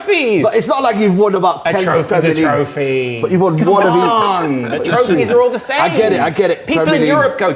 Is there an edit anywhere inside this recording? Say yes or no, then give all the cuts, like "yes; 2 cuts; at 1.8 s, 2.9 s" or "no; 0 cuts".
no; 0 cuts